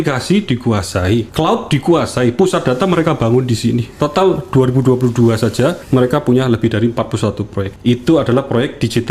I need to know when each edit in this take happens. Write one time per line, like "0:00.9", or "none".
0:01.3
0:03.9
0:05.8
0:07.7